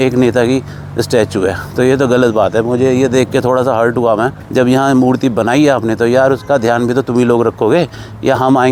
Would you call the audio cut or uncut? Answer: uncut